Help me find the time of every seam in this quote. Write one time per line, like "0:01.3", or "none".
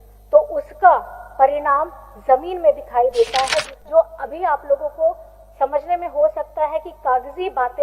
0:03.7

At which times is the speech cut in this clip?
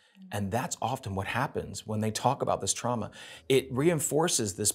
0:03.4

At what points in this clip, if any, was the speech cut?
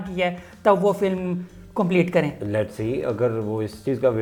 none

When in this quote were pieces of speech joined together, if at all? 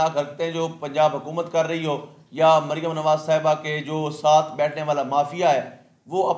none

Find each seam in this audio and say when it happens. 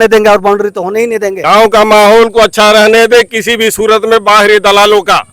0:01.3

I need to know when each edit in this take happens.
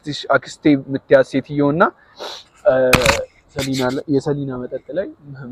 none

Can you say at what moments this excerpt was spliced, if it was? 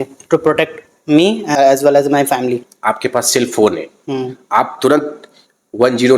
0:01.5
0:02.6

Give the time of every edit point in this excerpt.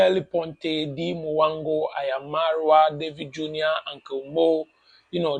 none

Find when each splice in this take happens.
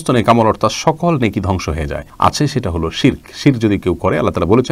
none

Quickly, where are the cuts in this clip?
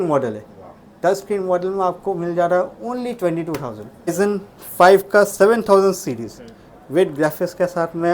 0:04.1

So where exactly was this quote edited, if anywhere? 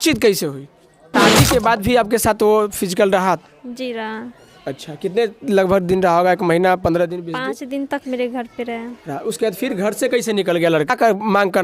0:01.1
0:10.9

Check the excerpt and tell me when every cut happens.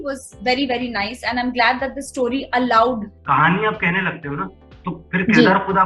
0:03.1

